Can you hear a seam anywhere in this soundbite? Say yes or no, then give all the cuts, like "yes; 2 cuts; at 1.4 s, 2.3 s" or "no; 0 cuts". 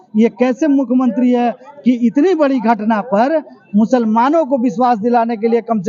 no; 0 cuts